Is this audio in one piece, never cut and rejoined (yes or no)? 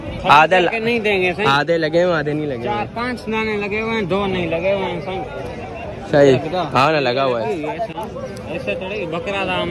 yes